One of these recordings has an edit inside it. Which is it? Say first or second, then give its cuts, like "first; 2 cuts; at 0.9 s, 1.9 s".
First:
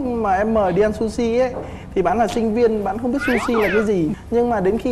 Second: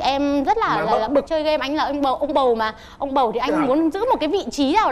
second; 1 cut; at 1.3 s